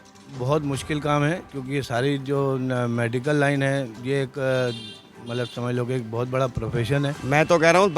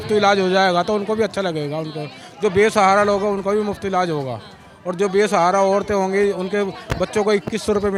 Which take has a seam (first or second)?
first